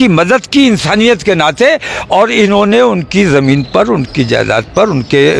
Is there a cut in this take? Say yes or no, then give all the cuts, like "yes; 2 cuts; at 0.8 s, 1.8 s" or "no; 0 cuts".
no; 0 cuts